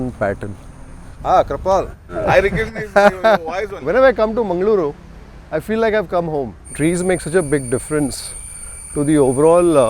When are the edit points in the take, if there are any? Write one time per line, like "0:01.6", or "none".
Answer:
0:01.1
0:03.7
0:06.6